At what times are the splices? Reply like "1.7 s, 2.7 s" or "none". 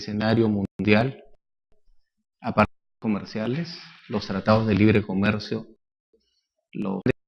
4.9 s